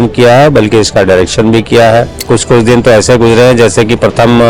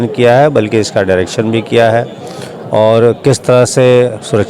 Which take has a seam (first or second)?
first